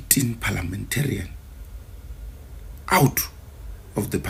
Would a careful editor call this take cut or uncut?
uncut